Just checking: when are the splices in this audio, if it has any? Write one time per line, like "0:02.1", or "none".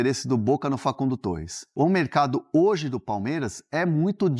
0:01.6